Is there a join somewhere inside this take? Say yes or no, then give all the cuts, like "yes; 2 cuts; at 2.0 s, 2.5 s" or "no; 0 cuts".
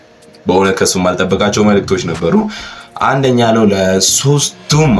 no; 0 cuts